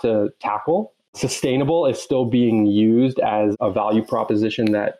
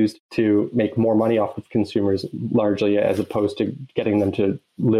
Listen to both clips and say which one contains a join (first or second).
first